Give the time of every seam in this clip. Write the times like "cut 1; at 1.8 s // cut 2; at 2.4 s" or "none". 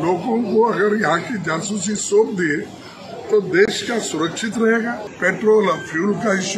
cut 1; at 5.1 s